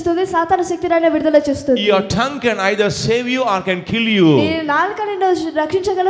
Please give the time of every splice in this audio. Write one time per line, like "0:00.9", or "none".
none